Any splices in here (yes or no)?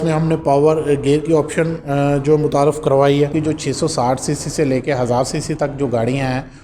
yes